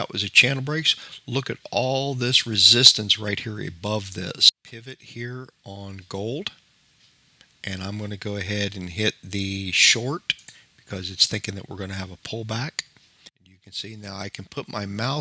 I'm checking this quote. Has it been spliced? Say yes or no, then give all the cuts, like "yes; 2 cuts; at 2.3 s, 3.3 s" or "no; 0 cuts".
yes; 2 cuts; at 4.5 s, 13.3 s